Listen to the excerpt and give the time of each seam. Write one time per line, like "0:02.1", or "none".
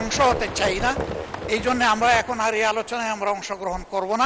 none

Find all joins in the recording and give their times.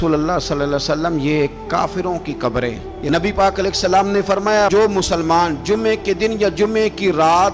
0:02.9

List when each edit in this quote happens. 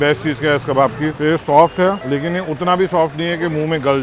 0:01.1
0:02.0

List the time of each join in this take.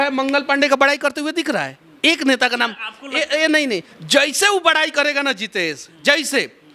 0:03.9

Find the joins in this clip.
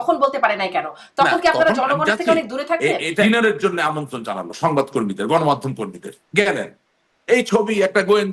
0:03.2

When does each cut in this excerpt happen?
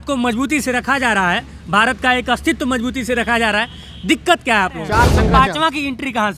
0:04.9

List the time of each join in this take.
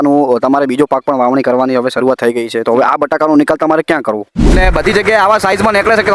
0:04.5

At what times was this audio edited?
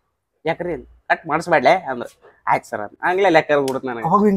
none

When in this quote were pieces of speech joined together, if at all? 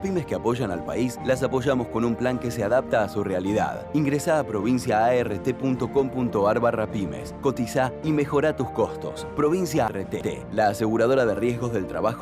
0:09.9

